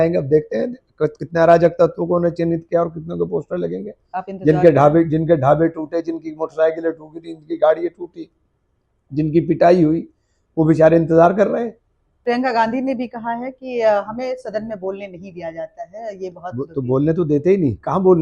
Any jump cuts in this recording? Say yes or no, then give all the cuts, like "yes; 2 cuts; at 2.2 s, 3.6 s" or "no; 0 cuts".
yes; 1 cut; at 12.2 s